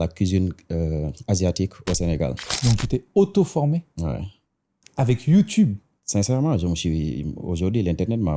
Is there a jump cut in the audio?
yes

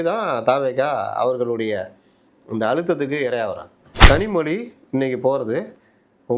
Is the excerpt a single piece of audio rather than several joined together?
no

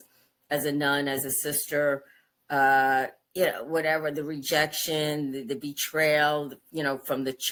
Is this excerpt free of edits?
yes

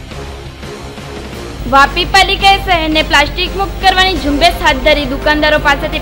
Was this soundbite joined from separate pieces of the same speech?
yes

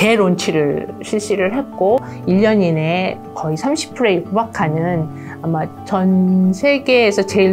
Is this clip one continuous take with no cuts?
no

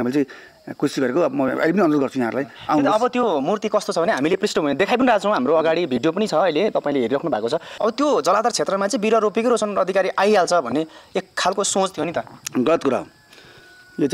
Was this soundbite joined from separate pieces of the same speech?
yes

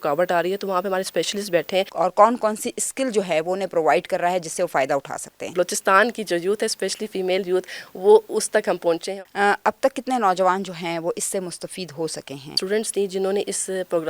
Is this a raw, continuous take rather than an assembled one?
no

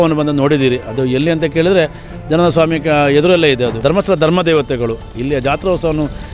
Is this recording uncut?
no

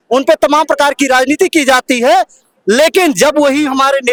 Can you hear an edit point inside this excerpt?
no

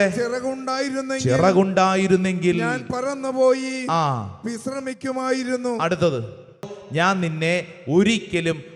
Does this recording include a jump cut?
yes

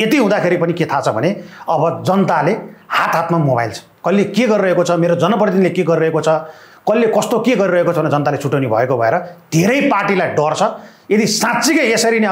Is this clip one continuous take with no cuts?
yes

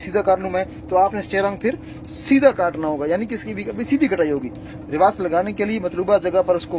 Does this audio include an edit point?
no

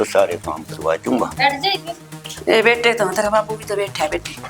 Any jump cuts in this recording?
yes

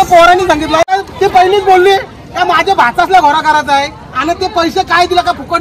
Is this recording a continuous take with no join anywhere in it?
no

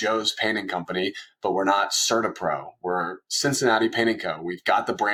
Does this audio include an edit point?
no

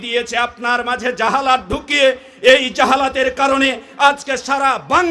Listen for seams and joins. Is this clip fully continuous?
yes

